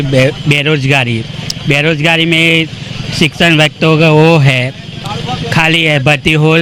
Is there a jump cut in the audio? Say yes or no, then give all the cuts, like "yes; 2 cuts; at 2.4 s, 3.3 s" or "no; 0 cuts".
no; 0 cuts